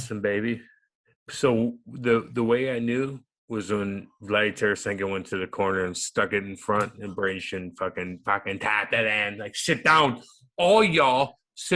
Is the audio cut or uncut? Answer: uncut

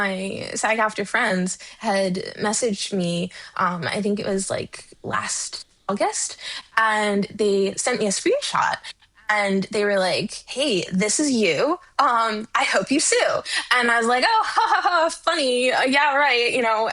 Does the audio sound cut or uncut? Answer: uncut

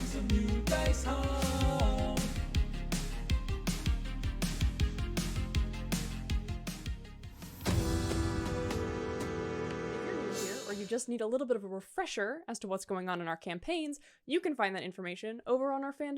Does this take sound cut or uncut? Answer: cut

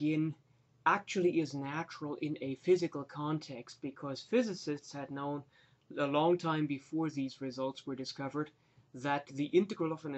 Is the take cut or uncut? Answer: cut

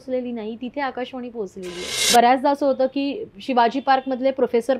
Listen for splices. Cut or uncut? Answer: cut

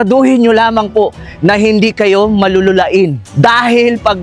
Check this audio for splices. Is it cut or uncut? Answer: cut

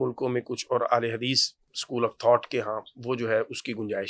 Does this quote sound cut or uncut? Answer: uncut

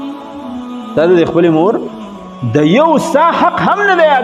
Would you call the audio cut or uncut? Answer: cut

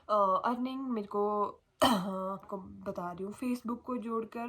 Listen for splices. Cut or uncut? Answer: cut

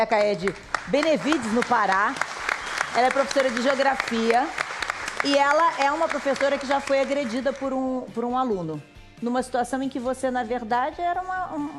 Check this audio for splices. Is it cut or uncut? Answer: uncut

